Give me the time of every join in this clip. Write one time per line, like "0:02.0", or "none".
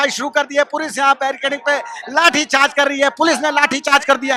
none